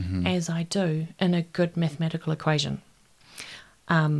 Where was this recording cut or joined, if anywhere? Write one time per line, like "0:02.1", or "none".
none